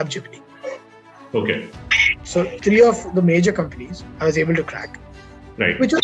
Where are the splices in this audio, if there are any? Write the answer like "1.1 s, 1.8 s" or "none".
2.6 s